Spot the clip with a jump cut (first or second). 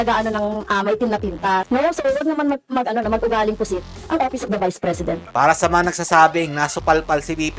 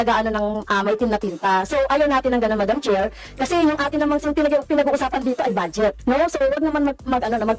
first